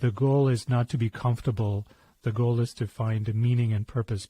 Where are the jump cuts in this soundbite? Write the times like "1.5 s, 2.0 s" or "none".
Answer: 2.2 s